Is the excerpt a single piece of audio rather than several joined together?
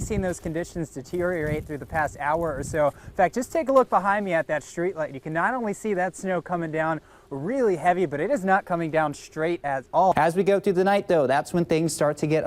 no; 1 cut; at 10.1 s

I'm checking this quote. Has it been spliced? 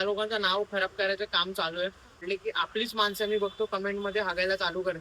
yes; 1 cut; at 2.2 s

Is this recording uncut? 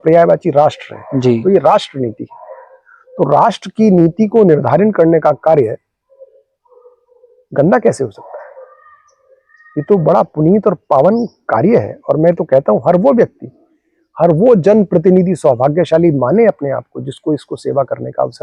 yes; 0 cuts

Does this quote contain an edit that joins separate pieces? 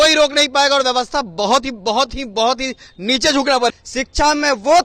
yes; 1 cut; at 3.7 s

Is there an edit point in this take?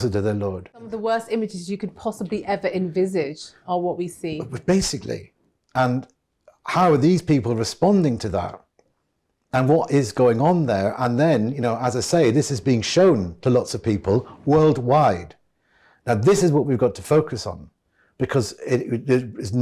yes; 1 cut; at 1.0 s

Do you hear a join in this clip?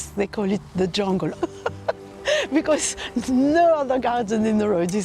yes; 1 cut; at 1.3 s

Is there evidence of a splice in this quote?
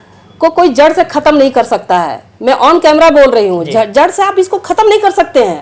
no; 0 cuts

